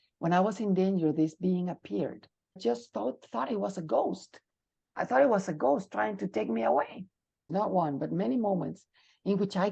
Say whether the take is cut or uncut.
cut